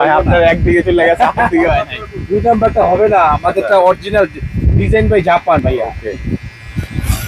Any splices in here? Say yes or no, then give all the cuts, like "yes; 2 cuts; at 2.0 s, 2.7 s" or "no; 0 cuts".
no; 0 cuts